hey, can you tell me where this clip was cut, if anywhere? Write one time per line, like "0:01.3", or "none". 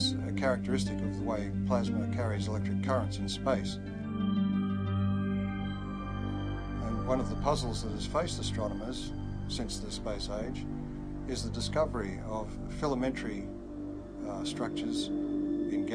0:12.2